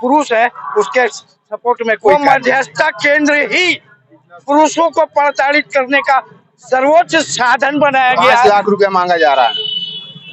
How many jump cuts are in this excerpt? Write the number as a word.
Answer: two